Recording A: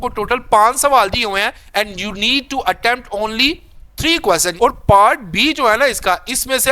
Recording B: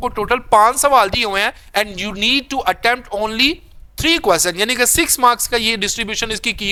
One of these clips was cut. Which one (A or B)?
A